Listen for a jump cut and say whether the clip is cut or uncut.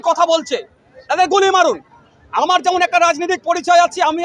uncut